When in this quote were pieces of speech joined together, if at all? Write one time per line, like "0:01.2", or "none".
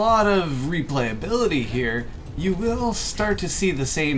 none